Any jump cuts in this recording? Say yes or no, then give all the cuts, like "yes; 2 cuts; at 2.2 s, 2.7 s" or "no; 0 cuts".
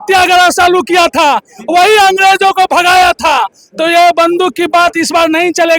no; 0 cuts